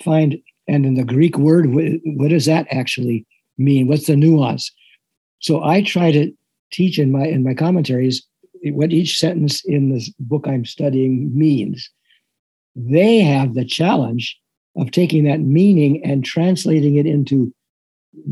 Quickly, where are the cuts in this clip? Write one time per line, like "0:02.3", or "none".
0:08.5